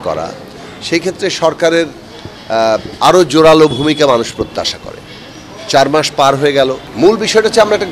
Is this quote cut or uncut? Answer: cut